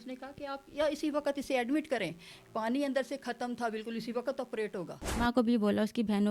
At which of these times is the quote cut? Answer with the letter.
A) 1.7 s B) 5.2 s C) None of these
B